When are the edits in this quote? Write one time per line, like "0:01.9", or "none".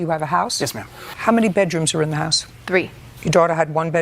0:02.8

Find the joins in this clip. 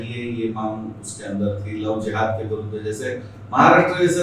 none

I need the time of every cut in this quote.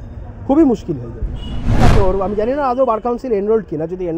0:01.8

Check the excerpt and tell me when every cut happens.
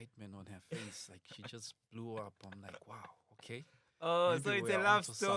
none

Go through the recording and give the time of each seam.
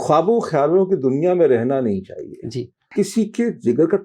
0:02.9

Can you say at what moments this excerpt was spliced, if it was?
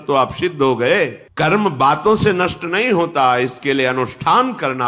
0:01.2

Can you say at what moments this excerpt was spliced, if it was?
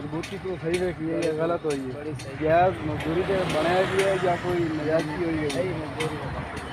0:02.3

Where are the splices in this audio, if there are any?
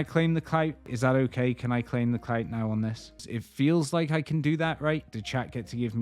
0:00.9
0:03.3
0:05.2

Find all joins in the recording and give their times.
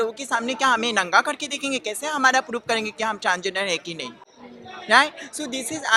none

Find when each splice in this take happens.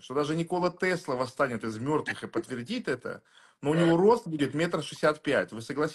none

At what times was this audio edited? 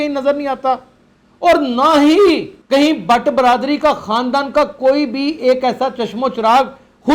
0:02.5

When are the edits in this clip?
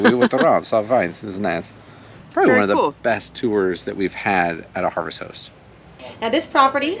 none

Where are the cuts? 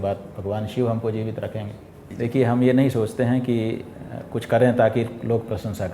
0:02.1

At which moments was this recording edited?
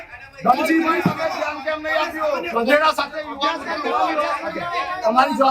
0:02.5

